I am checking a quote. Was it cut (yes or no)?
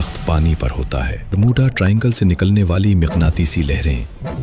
yes